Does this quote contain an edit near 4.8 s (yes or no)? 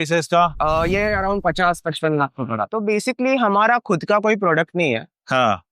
no